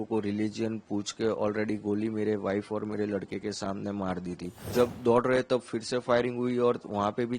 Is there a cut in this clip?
yes; 1 cut; at 4.6 s

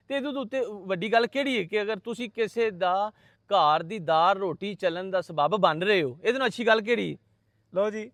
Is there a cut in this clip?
no; 0 cuts

